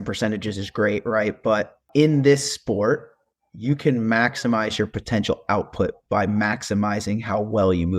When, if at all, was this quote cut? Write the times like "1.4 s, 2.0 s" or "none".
1.8 s